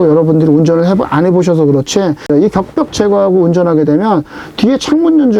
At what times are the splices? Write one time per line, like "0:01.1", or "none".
0:02.3